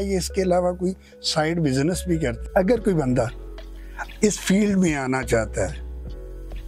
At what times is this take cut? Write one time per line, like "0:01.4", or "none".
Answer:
0:02.4